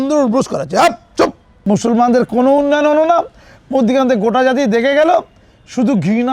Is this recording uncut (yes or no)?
no